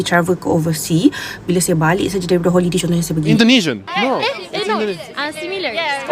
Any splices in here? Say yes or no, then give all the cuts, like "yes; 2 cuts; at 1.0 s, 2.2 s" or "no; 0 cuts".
yes; 1 cut; at 3.3 s